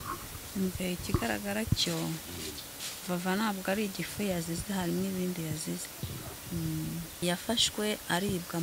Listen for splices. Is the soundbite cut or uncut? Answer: cut